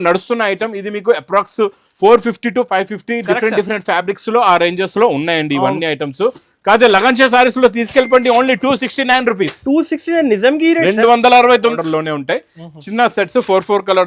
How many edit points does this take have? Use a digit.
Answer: 1